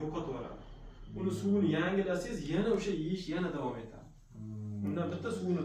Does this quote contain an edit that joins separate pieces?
no; 0 cuts

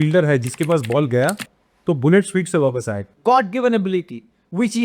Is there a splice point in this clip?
yes; 1 cut; at 3.0 s

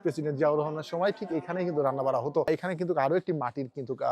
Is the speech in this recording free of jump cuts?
no; 1 cut; at 2.5 s

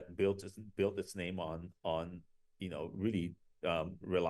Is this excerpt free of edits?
yes; 0 cuts

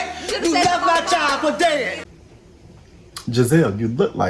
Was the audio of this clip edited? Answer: yes; 1 cut; at 2.1 s

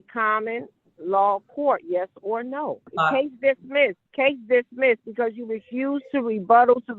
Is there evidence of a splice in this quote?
yes; 2 cuts; at 2.9 s, 4.0 s

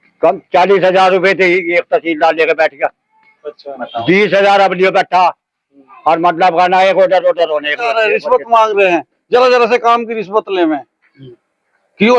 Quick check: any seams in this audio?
yes; 1 cut; at 7.8 s

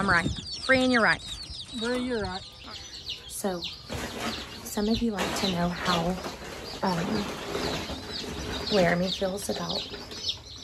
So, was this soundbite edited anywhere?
yes; 1 cut; at 2.6 s

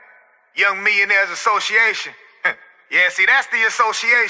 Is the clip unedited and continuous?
yes; 0 cuts

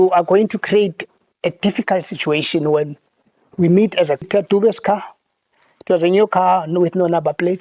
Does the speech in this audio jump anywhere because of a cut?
yes; 1 cut; at 4.2 s

